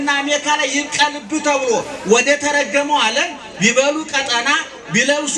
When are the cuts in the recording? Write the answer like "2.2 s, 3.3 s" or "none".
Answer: none